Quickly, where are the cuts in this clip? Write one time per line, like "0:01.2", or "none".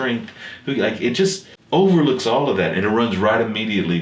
0:01.5